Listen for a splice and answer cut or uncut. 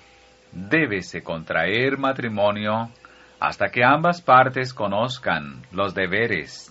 uncut